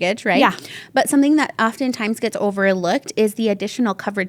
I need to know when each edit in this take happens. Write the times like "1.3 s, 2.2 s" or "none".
none